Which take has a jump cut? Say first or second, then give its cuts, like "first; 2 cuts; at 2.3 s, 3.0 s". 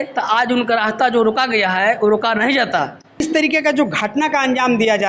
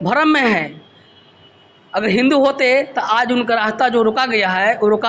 first; 1 cut; at 3.2 s